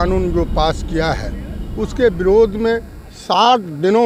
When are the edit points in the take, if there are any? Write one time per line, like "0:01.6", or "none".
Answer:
none